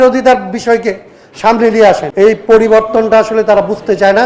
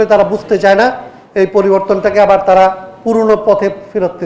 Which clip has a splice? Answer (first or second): first